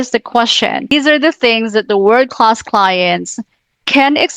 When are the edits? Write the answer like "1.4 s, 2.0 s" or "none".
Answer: 0.9 s